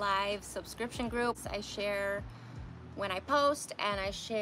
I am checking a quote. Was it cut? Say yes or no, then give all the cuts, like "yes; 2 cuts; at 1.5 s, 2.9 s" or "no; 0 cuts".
yes; 1 cut; at 1.4 s